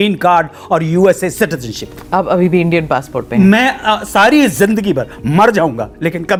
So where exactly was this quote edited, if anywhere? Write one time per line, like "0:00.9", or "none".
none